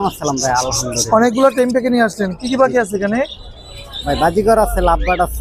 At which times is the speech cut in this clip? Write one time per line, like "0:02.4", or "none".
none